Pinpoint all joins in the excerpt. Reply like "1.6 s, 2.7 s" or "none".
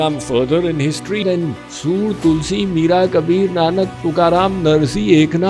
1.2 s